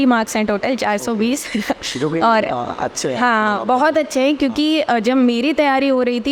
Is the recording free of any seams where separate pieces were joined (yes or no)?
yes